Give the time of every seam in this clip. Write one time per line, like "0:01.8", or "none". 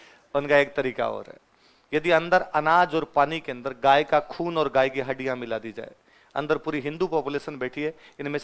none